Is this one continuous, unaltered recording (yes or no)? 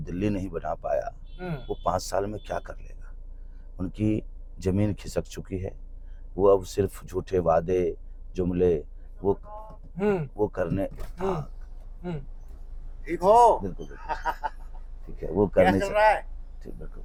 yes